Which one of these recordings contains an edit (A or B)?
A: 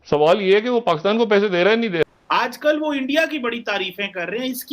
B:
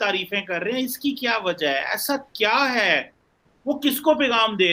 A